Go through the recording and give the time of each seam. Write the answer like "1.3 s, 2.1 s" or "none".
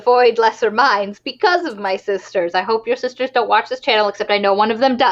none